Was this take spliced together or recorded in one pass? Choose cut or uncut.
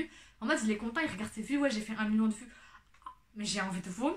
uncut